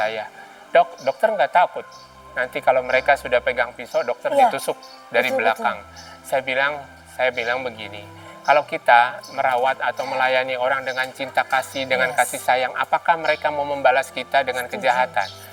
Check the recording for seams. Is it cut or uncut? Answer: uncut